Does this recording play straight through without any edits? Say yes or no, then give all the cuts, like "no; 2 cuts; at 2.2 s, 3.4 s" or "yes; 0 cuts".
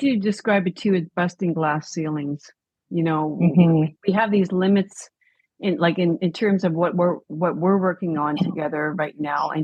yes; 0 cuts